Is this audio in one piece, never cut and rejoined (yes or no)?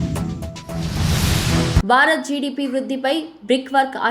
no